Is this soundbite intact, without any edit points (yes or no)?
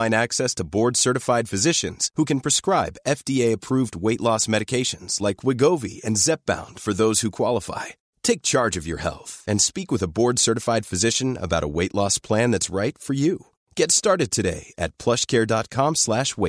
yes